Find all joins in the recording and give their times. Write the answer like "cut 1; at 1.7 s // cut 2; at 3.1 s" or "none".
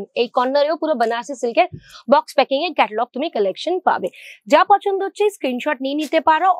none